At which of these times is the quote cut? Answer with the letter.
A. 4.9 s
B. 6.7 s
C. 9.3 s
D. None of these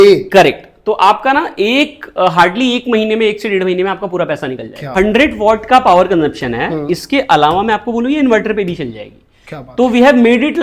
A